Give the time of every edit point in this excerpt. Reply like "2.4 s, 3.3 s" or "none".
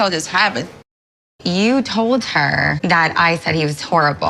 1.1 s, 2.8 s